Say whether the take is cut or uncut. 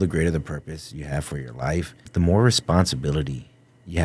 cut